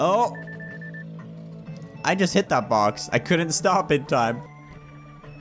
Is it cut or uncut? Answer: cut